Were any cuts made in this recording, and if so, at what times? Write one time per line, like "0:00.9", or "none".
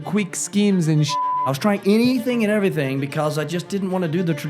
0:01.3